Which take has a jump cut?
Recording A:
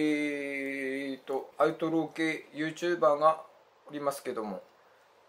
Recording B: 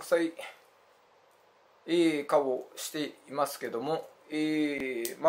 A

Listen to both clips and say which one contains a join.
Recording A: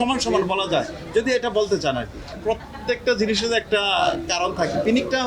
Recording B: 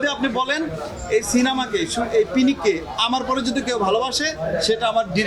A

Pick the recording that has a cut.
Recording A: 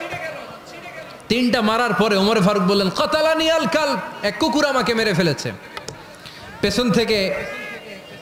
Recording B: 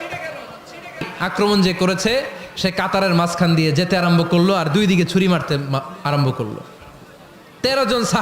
B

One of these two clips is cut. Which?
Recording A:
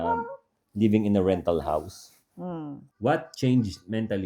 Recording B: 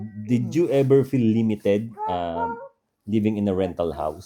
A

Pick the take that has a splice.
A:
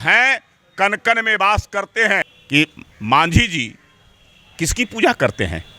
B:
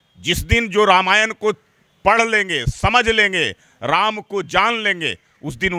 A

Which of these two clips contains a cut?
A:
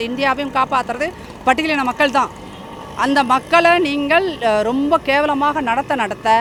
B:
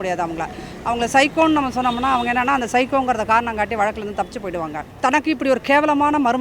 B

